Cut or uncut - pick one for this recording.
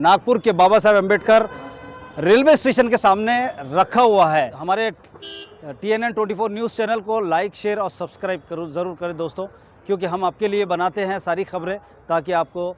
cut